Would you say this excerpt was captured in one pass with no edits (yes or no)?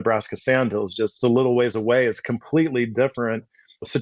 no